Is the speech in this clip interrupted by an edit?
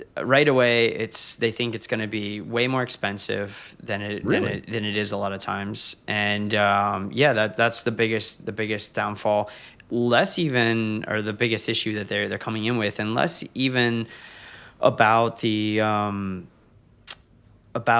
no; 0 cuts

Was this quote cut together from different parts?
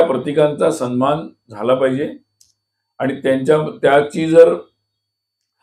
no; 0 cuts

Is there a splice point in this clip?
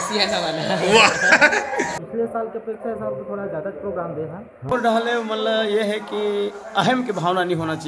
yes; 2 cuts; at 2.0 s, 4.7 s

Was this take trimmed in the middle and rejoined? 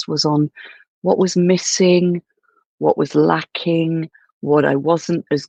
no; 0 cuts

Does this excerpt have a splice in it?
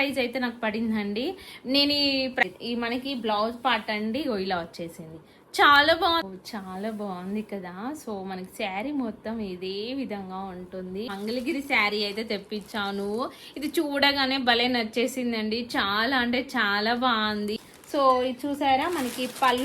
yes; 4 cuts; at 2.4 s, 6.3 s, 11.1 s, 17.6 s

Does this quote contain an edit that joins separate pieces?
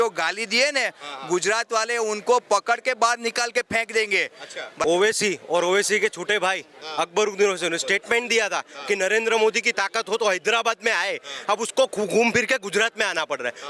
yes; 1 cut; at 4.8 s

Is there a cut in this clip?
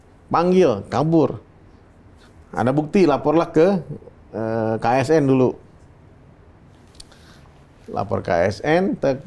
no; 0 cuts

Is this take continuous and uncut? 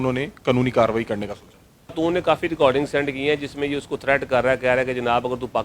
no; 1 cut; at 1.9 s

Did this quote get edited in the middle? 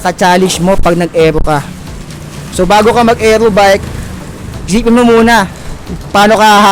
no; 0 cuts

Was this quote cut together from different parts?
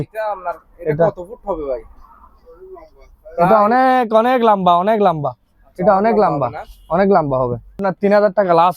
yes; 1 cut; at 7.8 s

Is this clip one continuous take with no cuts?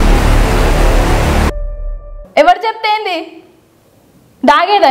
no; 1 cut; at 2.2 s

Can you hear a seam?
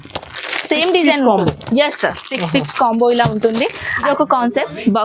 yes; 1 cut; at 4.1 s

